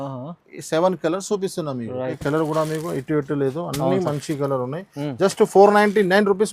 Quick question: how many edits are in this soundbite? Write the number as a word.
one